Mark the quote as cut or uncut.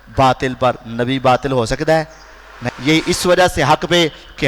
cut